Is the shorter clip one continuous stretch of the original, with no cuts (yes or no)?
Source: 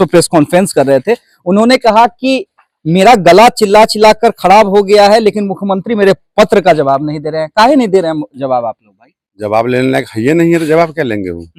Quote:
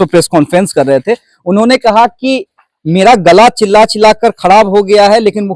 yes